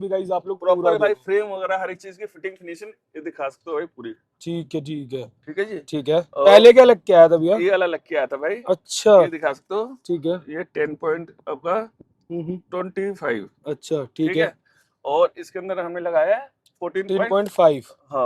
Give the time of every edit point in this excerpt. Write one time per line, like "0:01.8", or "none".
none